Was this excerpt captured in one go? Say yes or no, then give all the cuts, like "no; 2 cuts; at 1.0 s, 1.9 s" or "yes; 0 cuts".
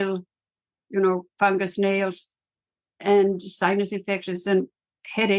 yes; 0 cuts